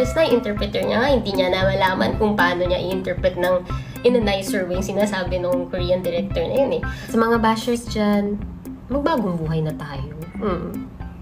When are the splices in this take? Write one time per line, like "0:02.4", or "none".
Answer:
0:07.0